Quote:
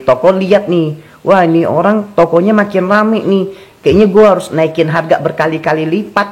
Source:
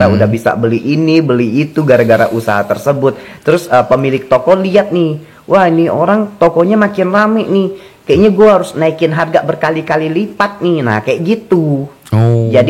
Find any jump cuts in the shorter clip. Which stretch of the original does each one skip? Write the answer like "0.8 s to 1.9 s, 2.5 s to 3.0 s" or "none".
none